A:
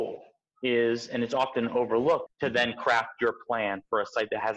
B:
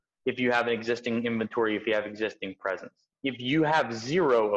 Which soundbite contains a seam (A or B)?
A